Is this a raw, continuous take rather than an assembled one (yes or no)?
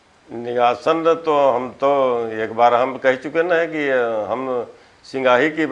yes